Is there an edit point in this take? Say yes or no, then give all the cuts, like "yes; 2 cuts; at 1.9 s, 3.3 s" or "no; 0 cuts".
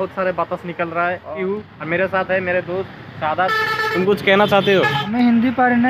yes; 1 cut; at 1.4 s